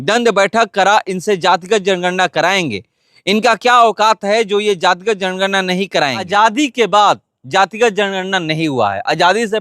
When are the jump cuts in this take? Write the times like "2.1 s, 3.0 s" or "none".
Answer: 6.3 s